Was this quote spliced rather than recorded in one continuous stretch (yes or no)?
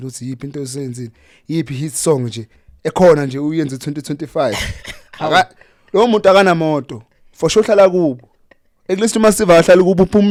no